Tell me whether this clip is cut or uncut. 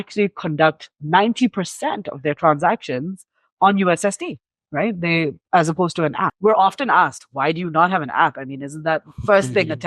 cut